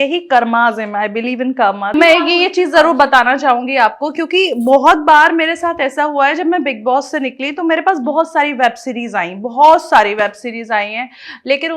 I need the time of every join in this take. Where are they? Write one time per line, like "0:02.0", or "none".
0:01.9